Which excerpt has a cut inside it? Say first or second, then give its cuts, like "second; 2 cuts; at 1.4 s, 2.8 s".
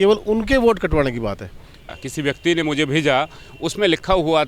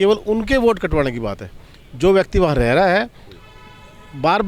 first; 1 cut; at 1.9 s